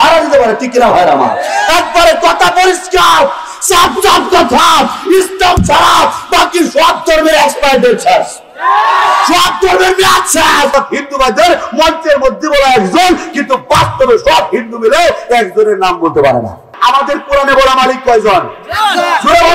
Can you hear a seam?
yes; 2 cuts; at 10.7 s, 16.7 s

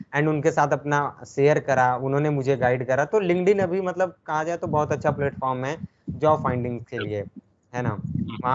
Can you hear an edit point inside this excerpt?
no; 0 cuts

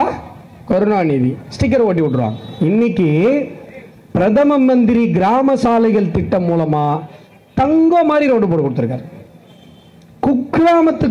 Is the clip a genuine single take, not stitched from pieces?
no; 1 cut; at 2.4 s

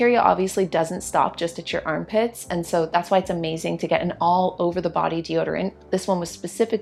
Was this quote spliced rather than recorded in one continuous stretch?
no; 0 cuts

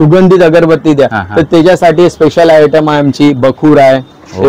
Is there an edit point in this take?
no; 0 cuts

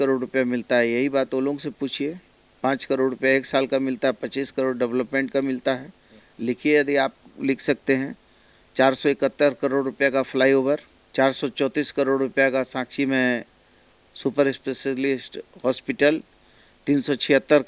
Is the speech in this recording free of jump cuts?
yes; 0 cuts

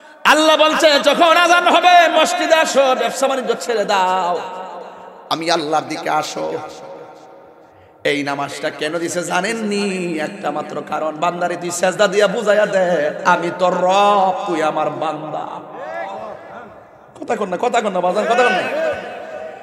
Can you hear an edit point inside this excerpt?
no; 0 cuts

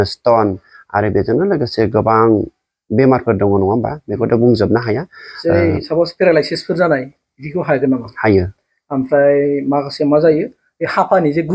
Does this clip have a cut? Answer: no; 0 cuts

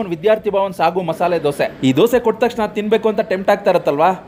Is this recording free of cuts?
yes; 0 cuts

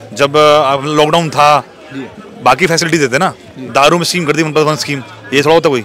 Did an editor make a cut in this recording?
no; 0 cuts

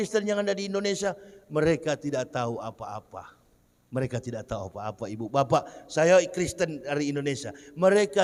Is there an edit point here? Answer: no; 0 cuts

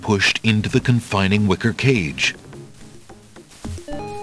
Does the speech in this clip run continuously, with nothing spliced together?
no; 1 cut; at 2.3 s

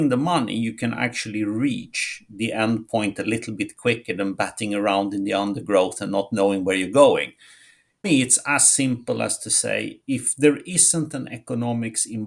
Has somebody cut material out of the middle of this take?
yes; 1 cut; at 8.1 s

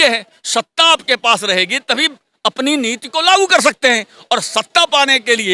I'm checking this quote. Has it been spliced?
no; 0 cuts

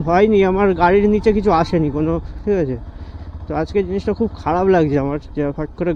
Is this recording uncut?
yes; 0 cuts

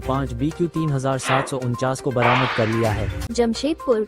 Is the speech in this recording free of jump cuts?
no; 1 cut; at 3.1 s

